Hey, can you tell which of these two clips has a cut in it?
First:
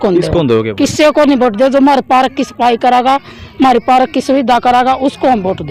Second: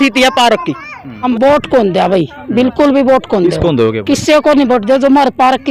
second; 1 cut; at 1.2 s

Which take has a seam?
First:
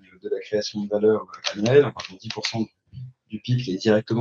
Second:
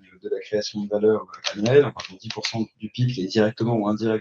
second; 1 cut; at 2.8 s

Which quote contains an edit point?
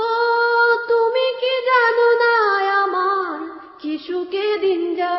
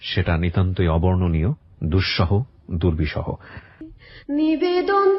second; 1 cut; at 3.7 s

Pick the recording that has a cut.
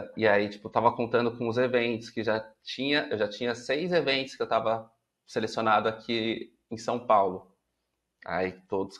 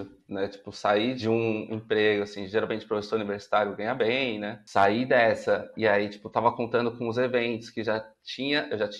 second; 2 cuts; at 1.2 s, 4.6 s

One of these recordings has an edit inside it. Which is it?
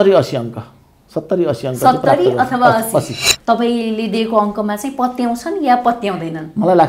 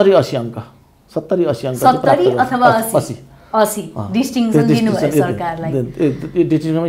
first; 1 cut; at 3.2 s

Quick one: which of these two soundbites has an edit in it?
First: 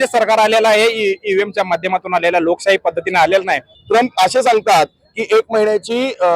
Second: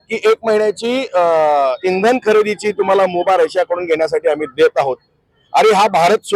first; 1 cut; at 3.7 s

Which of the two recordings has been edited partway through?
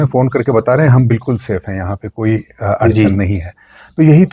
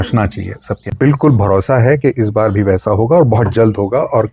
second; 1 cut; at 0.9 s

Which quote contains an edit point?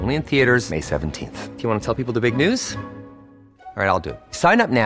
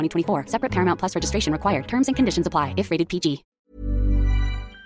second; 1 cut; at 3.7 s

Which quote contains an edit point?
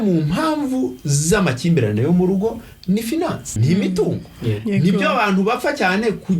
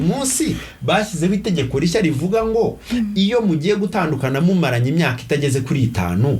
first; 1 cut; at 3.6 s

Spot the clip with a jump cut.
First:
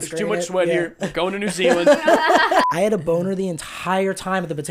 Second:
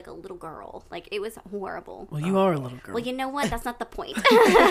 first; 1 cut; at 2.7 s

